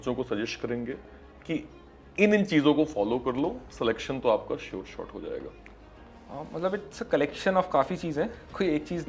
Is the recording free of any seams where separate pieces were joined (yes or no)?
yes